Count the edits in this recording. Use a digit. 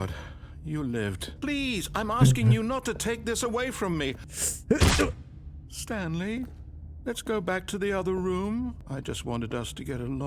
3